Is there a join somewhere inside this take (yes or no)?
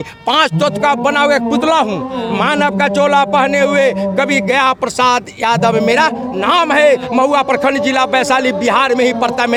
no